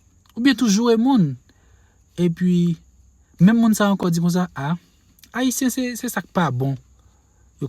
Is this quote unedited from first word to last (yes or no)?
no